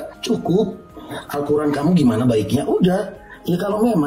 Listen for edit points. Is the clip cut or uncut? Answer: uncut